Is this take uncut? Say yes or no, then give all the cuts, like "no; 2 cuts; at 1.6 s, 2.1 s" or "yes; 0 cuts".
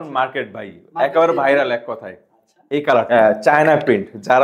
no; 1 cut; at 3.1 s